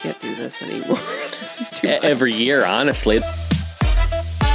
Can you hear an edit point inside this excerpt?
yes; 1 cut; at 3.2 s

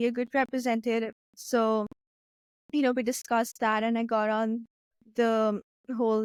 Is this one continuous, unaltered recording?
yes; 0 cuts

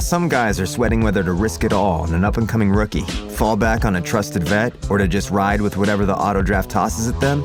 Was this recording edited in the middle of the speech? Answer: no; 0 cuts

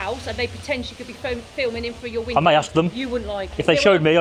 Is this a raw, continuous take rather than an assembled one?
yes; 0 cuts

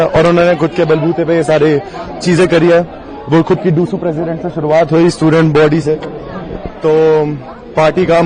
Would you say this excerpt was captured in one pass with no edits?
yes; 0 cuts

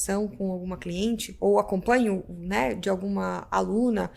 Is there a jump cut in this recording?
yes; 1 cut; at 1.3 s

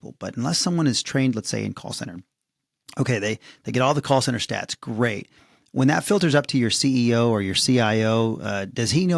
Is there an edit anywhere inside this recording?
no; 0 cuts

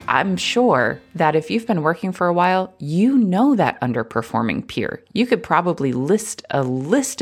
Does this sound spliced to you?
yes; 1 cut; at 1.0 s

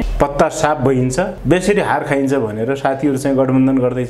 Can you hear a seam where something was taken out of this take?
no; 0 cuts

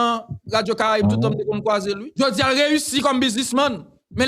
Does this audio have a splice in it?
yes; 1 cut; at 2.1 s

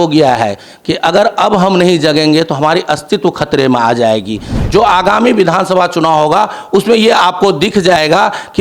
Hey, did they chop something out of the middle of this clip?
yes; 1 cut; at 4.6 s

